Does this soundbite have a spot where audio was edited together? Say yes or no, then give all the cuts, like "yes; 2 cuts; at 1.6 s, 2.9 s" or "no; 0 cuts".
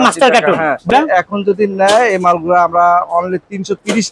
yes; 1 cut; at 0.9 s